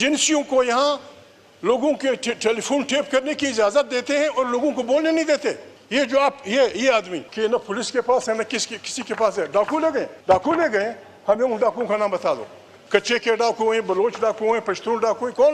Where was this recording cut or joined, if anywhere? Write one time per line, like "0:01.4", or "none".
0:05.7
0:07.2
0:10.1